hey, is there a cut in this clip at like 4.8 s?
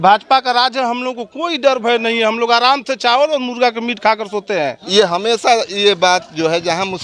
yes; 1 cut; at 4.8 s

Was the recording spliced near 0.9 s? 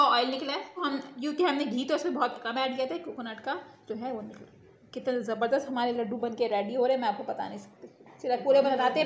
yes; 1 cut; at 0.9 s

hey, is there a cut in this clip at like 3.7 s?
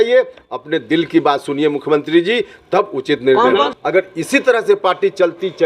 yes; 1 cut; at 3.7 s

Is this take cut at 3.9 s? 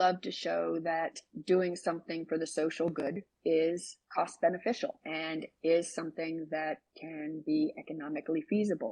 yes; 2 cuts; at 3.9 s, 5.0 s

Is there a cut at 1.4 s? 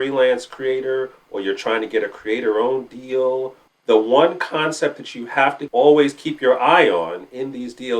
no; 2 cuts; at 3.6 s, 5.6 s

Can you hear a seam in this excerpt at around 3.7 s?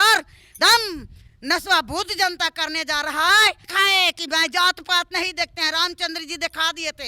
yes; 1 cut; at 3.7 s

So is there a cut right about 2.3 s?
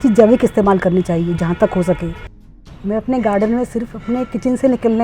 yes; 1 cut; at 2.3 s

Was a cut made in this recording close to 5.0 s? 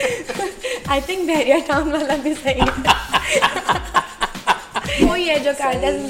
yes; 1 cut; at 5.0 s

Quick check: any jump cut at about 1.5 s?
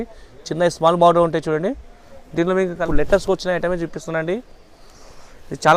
no; 1 cut; at 2.8 s

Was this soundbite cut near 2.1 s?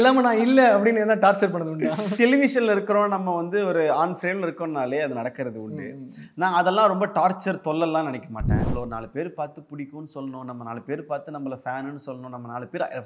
yes; 2 cuts; at 2.1 s, 8.6 s

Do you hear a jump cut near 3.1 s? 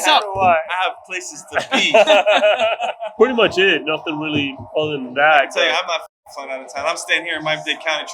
yes; 1 cut; at 3.1 s

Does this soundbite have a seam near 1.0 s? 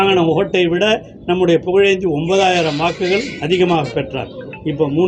no; 0 cuts

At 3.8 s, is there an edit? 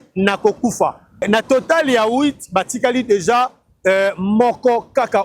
no; 1 cut; at 1.2 s

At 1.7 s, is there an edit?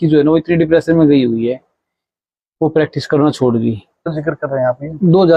no; 1 cut; at 4.4 s

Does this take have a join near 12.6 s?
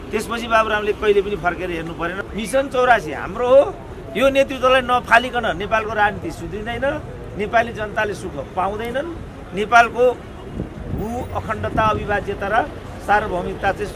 no; 1 cut; at 2.1 s

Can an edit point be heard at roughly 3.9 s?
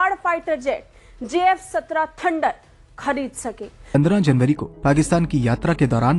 yes; 1 cut; at 3.9 s

